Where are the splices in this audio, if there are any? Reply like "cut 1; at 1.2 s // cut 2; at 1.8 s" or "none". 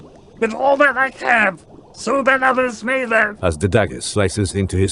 cut 1; at 3.3 s